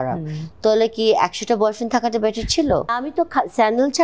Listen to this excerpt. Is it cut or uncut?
cut